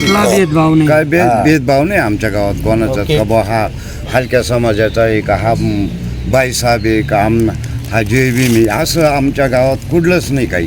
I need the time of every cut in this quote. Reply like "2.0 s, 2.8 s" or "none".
none